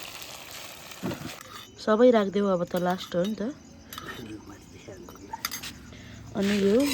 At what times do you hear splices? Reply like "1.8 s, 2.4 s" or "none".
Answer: 1.2 s

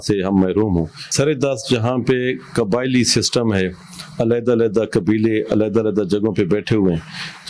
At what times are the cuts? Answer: 1.1 s

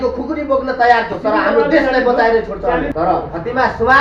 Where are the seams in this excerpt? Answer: 2.9 s

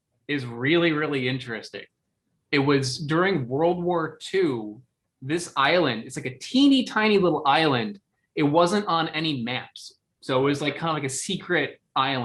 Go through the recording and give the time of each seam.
2.3 s

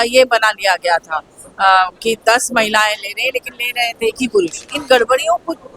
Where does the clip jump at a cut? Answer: 4.7 s

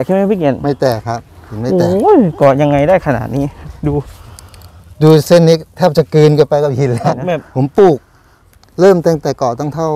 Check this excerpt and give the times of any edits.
7.5 s

